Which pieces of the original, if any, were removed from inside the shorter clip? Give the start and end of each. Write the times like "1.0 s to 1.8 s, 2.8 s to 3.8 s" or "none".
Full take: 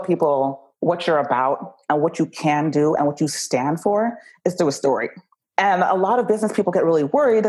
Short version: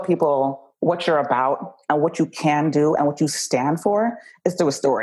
none